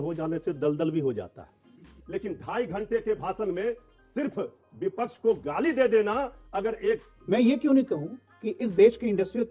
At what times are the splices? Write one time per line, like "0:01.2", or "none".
0:01.9
0:07.1